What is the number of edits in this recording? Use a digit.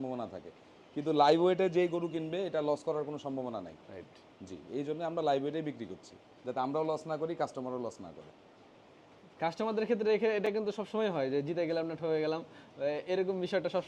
0